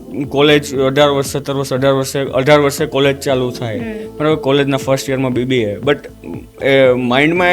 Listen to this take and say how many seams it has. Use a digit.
0